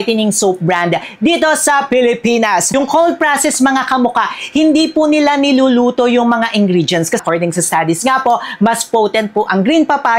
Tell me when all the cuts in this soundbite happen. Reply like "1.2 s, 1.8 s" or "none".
2.7 s, 7.2 s